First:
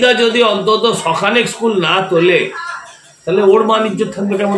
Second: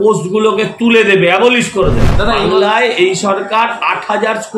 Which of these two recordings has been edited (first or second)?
second